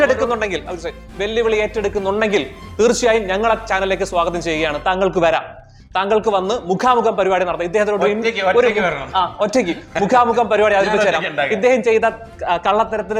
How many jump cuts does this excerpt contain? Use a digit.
0